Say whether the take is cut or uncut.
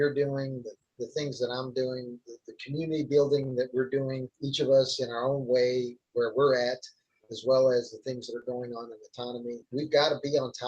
cut